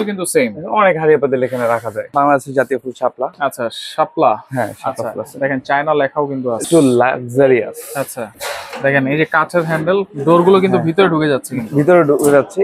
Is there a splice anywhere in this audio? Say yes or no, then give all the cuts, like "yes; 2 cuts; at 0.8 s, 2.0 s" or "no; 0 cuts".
yes; 3 cuts; at 2.1 s, 6.6 s, 8.4 s